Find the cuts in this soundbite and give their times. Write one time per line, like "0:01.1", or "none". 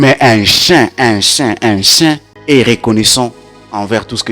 0:02.3